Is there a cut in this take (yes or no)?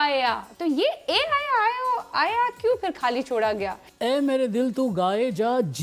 yes